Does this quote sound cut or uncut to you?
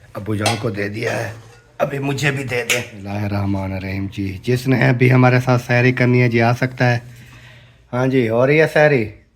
cut